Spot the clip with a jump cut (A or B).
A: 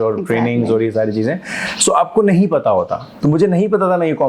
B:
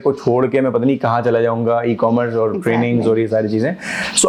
A